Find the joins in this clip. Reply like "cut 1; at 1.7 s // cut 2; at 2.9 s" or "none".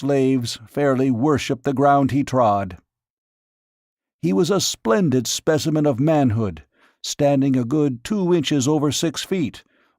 cut 1; at 2.3 s